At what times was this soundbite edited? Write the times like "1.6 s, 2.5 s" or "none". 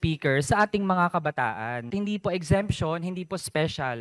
1.8 s